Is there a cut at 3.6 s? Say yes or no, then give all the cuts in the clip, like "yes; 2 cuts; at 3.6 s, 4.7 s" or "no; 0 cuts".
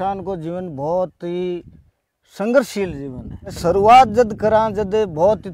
yes; 1 cut; at 3.6 s